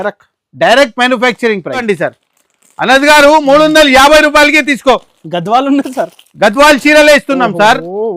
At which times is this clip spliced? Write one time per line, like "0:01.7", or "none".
0:01.7

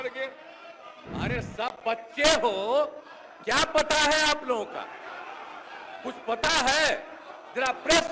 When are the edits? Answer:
0:00.9

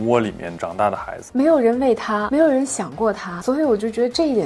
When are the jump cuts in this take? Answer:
0:01.1
0:02.3

